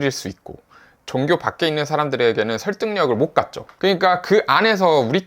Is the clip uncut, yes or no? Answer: no